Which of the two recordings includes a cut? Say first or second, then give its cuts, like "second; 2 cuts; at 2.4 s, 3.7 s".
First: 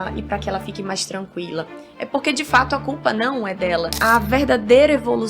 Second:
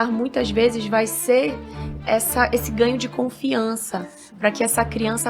first; 1 cut; at 3.9 s